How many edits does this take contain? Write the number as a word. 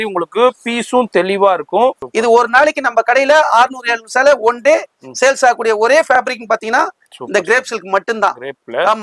one